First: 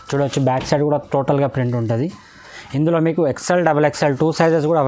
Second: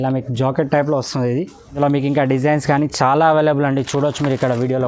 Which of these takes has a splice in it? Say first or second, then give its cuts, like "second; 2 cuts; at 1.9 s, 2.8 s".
second; 1 cut; at 1.6 s